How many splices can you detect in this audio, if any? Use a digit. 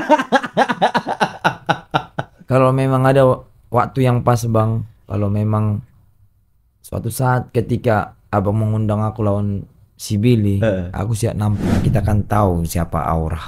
1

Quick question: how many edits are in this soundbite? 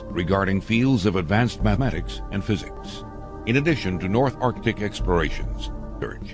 1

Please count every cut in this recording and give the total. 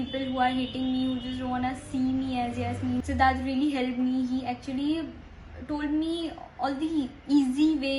1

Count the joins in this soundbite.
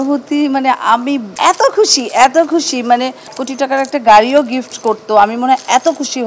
2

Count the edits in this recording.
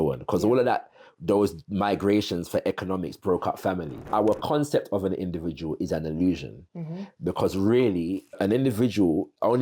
2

